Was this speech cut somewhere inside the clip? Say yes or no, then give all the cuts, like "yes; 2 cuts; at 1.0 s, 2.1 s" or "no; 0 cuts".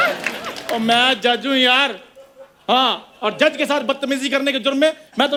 no; 0 cuts